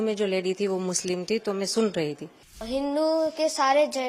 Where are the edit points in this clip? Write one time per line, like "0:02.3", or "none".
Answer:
0:02.6